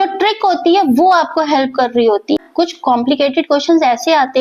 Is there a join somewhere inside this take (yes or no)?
yes